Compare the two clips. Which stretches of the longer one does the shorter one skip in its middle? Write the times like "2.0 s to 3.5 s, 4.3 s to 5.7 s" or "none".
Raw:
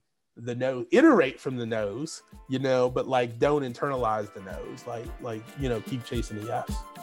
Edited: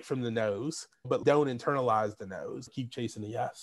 2.5 s to 3.3 s, 4.8 s to 5.8 s